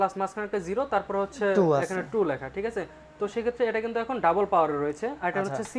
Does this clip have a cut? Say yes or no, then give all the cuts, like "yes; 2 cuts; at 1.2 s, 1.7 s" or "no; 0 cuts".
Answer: no; 0 cuts